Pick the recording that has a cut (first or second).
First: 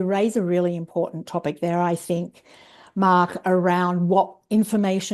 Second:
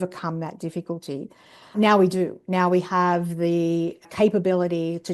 second